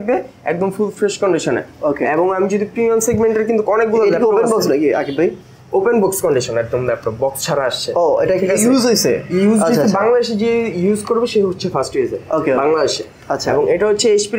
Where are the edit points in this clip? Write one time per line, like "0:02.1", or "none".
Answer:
none